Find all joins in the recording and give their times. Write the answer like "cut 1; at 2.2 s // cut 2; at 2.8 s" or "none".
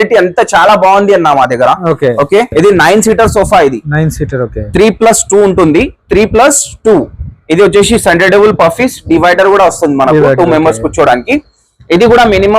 cut 1; at 2.5 s

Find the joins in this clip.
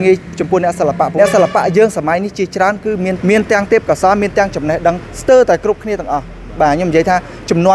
cut 1; at 1.1 s // cut 2; at 3.2 s // cut 3; at 5.1 s

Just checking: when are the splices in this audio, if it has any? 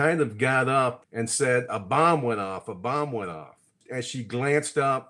cut 1; at 1.0 s // cut 2; at 3.8 s

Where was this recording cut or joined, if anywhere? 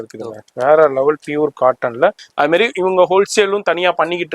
cut 1; at 2.2 s

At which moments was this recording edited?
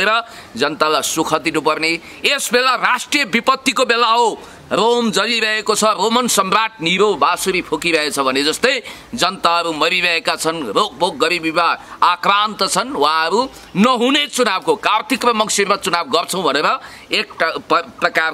cut 1; at 4.5 s

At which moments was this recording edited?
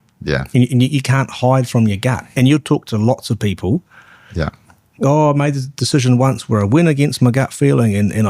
cut 1; at 2.2 s

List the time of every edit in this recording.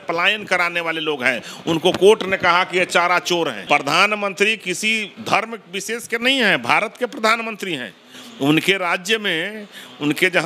cut 1; at 3.6 s

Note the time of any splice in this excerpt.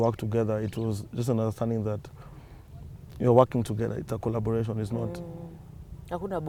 none

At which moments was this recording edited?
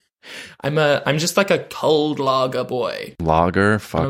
cut 1; at 1.7 s // cut 2; at 3.1 s

